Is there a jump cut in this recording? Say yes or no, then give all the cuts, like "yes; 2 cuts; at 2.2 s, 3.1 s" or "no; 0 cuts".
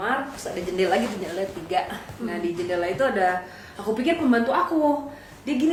no; 0 cuts